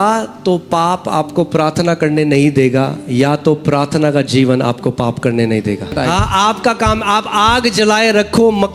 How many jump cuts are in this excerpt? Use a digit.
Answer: 1